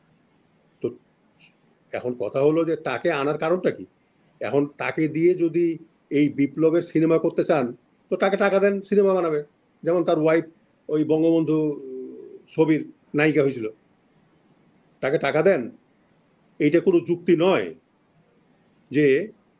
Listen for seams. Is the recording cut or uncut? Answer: uncut